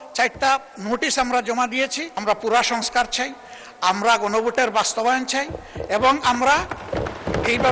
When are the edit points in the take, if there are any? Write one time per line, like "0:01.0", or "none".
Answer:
0:02.1